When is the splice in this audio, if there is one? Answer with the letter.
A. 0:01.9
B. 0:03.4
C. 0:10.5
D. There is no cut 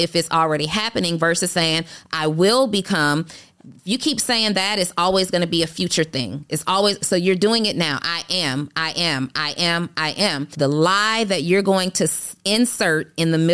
C